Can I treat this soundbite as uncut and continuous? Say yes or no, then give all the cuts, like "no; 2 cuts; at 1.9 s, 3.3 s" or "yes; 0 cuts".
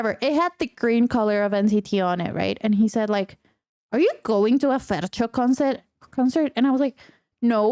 yes; 0 cuts